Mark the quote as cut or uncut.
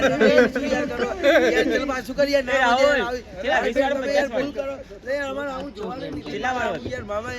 uncut